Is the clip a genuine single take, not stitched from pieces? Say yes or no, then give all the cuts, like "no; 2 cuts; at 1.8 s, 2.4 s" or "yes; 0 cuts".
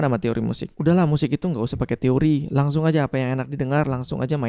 yes; 0 cuts